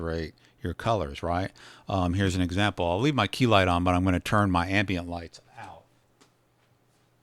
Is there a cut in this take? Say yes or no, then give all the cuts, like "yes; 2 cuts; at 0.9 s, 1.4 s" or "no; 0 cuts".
yes; 1 cut; at 6.1 s